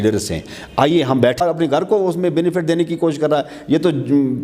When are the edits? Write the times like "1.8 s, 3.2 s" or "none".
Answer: 1.4 s